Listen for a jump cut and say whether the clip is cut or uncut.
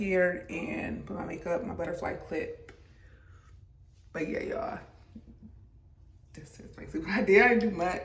uncut